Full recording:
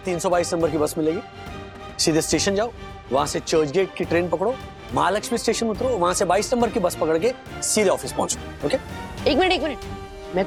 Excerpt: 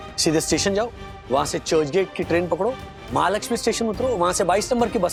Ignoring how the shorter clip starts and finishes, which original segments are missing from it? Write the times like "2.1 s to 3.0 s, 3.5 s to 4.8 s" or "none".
none